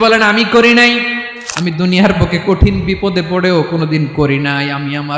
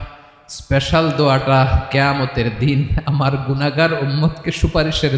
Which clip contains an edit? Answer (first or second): first